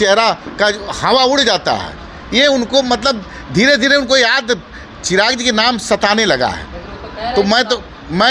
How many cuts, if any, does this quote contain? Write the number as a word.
zero